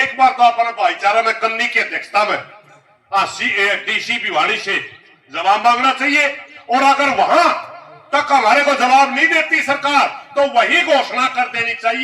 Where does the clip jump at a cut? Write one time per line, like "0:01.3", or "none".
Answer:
none